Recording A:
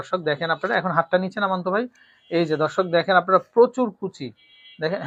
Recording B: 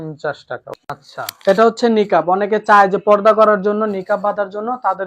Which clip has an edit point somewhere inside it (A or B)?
B